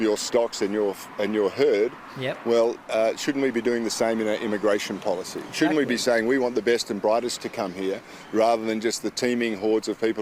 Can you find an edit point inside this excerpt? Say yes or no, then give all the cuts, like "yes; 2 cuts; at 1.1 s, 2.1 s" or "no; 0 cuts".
no; 0 cuts